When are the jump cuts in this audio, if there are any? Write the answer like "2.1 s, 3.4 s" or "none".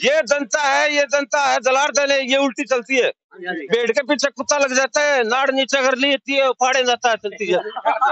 none